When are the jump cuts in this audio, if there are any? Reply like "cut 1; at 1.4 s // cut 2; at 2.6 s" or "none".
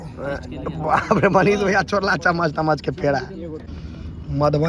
cut 1; at 3.7 s